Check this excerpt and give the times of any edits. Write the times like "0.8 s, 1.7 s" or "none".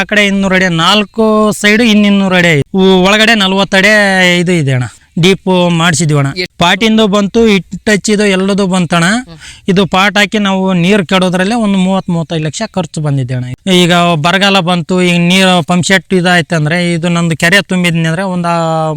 2.7 s, 6.5 s, 13.6 s

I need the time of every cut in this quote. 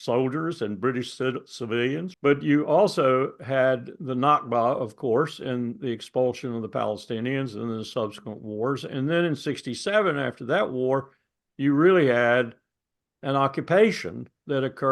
2.1 s

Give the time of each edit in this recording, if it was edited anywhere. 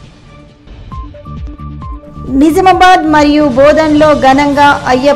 0.9 s

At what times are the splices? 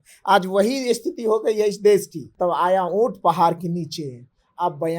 2.2 s

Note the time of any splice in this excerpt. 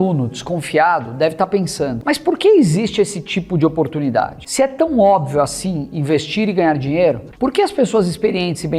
2.0 s, 4.4 s, 7.3 s

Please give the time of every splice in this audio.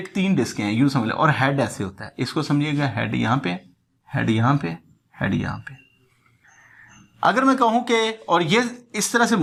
none

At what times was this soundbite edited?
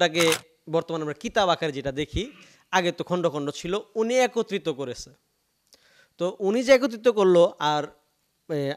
none

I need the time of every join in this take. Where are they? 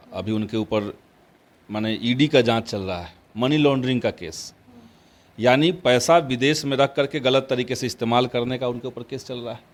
none

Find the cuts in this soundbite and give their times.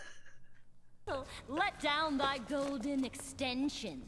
1.0 s

